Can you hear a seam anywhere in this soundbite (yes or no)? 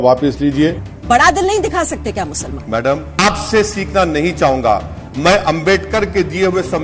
yes